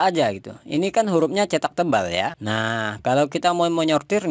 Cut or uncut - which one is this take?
cut